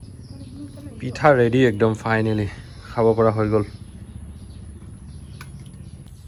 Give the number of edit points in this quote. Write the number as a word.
zero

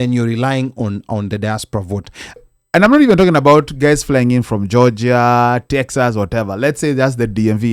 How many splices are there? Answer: one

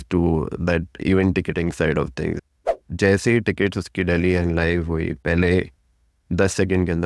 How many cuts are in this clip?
one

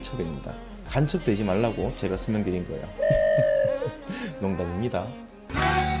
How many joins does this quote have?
zero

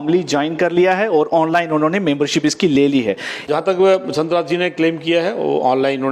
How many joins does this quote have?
one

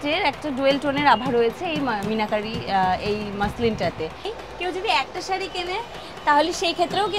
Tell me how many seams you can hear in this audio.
one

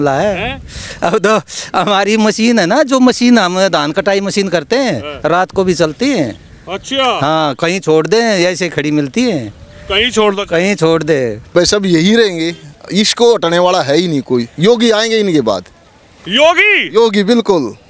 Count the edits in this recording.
one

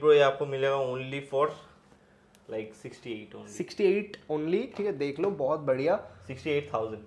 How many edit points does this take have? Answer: zero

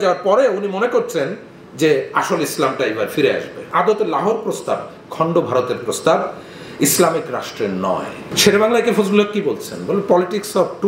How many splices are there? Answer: two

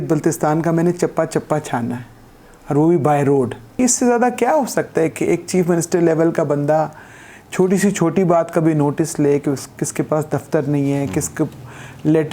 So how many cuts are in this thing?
one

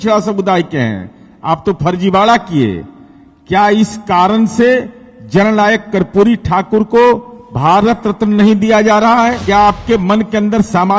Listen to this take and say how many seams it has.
one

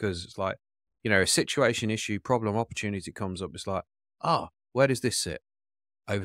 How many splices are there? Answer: zero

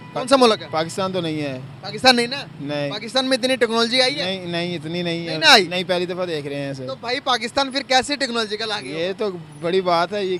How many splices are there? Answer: zero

